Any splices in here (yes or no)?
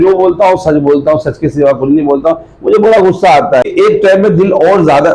yes